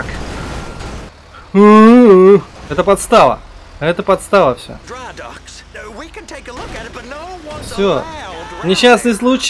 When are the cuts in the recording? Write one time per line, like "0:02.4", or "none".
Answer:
0:01.1
0:02.6
0:04.8